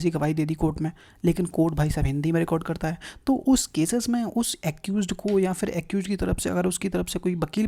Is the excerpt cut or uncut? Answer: uncut